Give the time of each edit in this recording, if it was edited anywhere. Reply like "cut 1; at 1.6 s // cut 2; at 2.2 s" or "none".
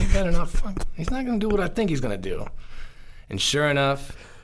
none